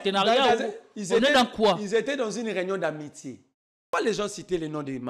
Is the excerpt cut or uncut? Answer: cut